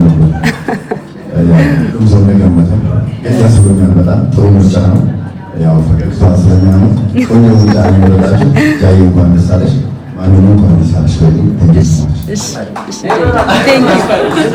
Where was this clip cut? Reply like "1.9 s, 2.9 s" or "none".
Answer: none